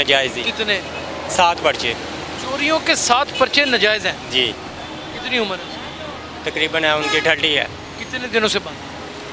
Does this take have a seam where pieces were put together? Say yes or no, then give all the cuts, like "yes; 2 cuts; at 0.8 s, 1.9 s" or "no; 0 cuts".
no; 0 cuts